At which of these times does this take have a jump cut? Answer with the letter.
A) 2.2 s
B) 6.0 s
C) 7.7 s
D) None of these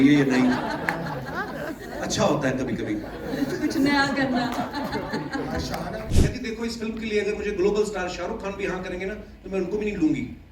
B